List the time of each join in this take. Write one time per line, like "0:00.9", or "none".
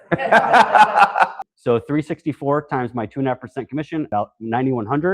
0:01.3
0:04.1